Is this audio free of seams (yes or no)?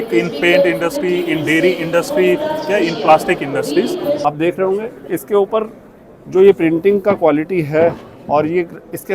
no